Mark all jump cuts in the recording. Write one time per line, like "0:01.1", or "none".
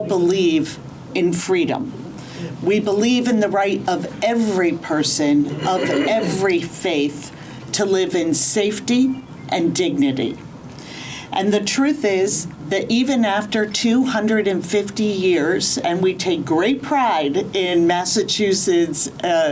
none

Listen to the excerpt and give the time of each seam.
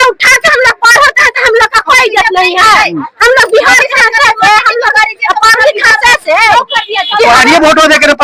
none

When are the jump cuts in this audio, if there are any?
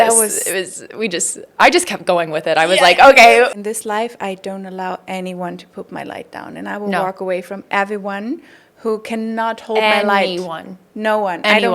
0:03.5

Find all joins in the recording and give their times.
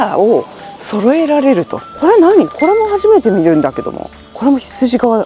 0:01.8

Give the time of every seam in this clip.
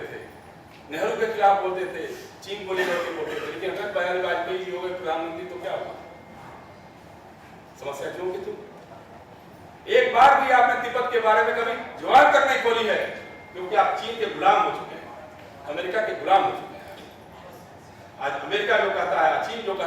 none

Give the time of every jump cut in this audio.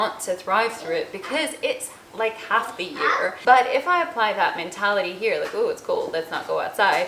0:03.4

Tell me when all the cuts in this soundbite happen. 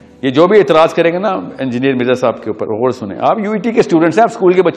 none

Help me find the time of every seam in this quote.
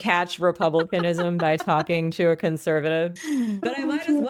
none

